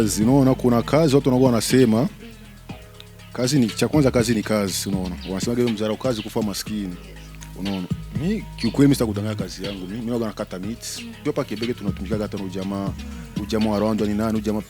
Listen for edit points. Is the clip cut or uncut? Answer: cut